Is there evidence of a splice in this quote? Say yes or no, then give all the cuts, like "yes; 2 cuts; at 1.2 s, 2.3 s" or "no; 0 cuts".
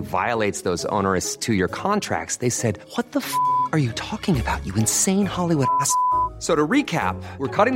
no; 0 cuts